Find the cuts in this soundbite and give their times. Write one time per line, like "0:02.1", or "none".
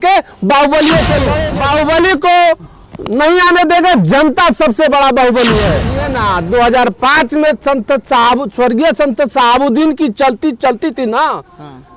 0:01.4
0:06.0